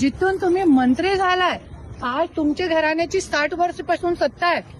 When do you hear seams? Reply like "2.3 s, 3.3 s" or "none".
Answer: none